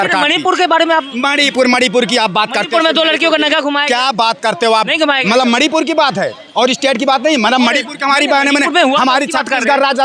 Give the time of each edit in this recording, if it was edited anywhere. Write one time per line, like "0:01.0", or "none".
none